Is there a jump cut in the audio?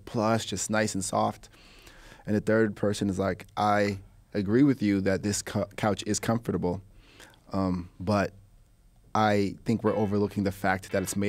no; 0 cuts

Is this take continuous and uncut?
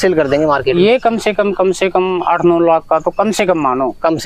yes; 0 cuts

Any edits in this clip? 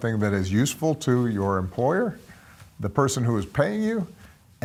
no; 0 cuts

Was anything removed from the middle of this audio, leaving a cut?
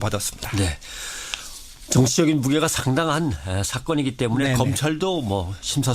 yes; 1 cut; at 1.3 s

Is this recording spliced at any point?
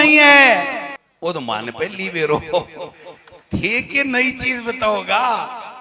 yes; 1 cut; at 1.0 s

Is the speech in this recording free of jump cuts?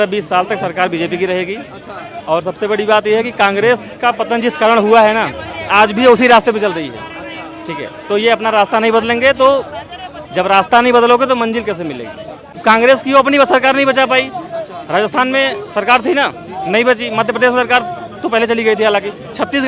no; 1 cut; at 12.5 s

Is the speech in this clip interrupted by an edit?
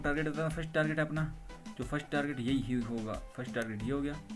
no; 0 cuts

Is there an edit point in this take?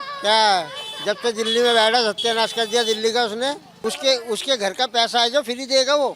yes; 1 cut; at 3.7 s

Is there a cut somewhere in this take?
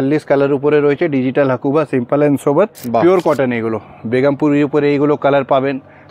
yes; 1 cut; at 2.8 s

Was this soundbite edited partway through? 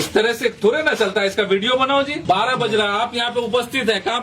yes; 1 cut; at 2.2 s

